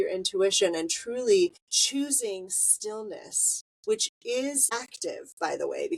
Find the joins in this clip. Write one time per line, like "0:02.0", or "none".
0:01.7
0:04.8

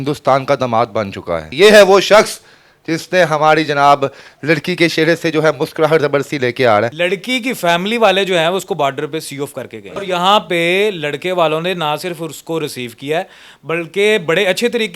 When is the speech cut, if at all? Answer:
0:01.5
0:06.9
0:10.0

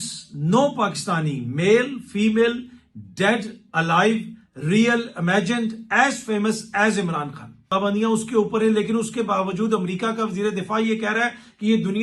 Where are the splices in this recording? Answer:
0:07.5

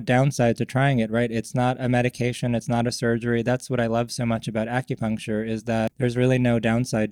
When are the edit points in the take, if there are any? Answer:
0:05.9

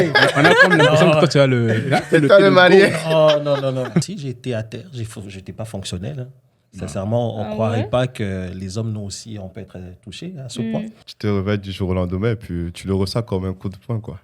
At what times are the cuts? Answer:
0:04.2
0:11.0

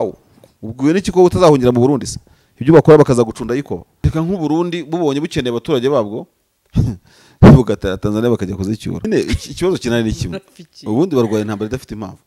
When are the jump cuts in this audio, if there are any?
0:04.0
0:09.1

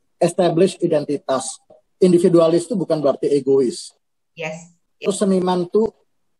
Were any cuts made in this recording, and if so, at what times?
0:01.8
0:05.1

